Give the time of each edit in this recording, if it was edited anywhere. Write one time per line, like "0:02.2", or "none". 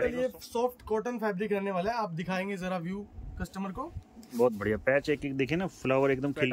none